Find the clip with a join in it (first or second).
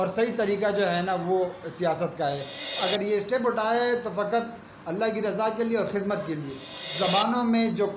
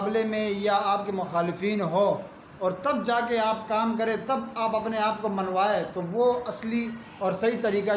first